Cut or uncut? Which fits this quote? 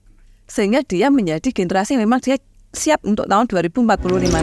uncut